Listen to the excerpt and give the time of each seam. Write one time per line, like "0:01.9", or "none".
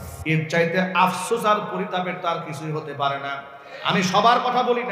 0:03.7